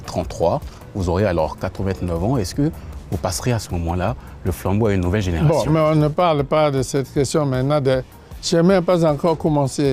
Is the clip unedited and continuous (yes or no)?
yes